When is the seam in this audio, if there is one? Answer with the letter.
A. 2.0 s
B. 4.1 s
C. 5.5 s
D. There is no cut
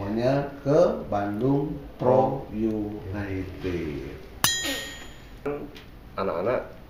C